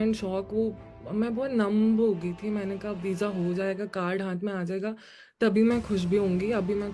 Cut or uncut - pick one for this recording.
uncut